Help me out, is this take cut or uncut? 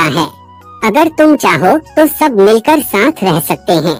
uncut